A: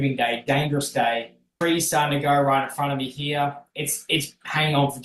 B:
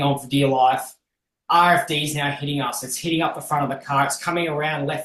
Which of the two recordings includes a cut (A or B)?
A